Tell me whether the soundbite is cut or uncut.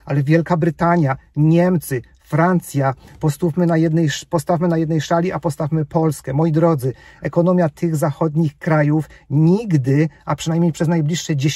uncut